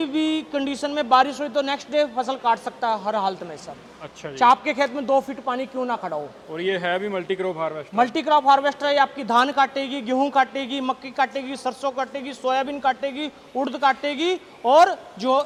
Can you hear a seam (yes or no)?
no